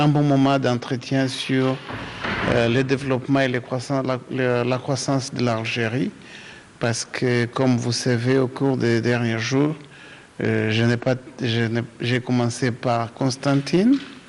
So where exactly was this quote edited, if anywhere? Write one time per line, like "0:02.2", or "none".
none